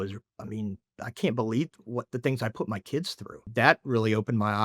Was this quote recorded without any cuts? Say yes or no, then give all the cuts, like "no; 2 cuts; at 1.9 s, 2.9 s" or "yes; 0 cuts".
no; 1 cut; at 3.5 s